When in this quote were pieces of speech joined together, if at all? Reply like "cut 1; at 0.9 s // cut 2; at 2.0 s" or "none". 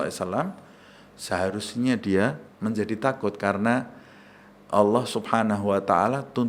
cut 1; at 2.5 s

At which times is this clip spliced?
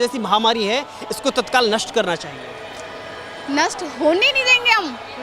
none

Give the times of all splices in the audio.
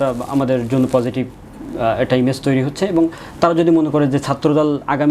none

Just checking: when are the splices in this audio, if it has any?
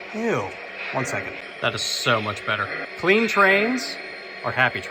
cut 1; at 1.4 s // cut 2; at 2.9 s

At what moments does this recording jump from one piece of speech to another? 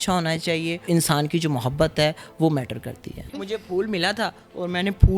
cut 1; at 0.8 s // cut 2; at 3.4 s

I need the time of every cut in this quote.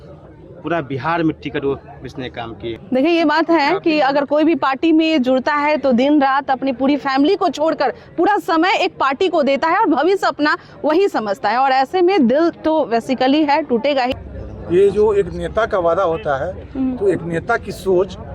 cut 1; at 2.8 s // cut 2; at 14.3 s

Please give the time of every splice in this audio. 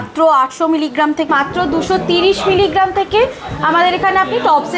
cut 1; at 1.3 s

